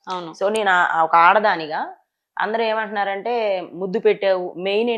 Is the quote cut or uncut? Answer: uncut